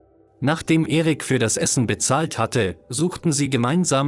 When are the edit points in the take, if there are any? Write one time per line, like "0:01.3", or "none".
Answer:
0:02.8